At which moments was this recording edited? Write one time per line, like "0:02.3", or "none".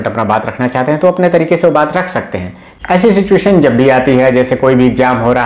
0:02.7